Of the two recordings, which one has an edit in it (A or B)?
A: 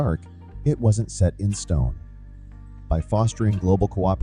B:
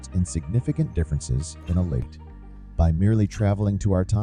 B